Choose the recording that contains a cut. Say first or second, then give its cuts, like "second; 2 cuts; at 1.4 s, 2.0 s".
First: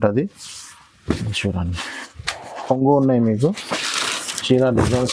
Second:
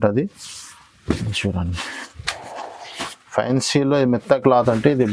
first; 1 cut; at 2.6 s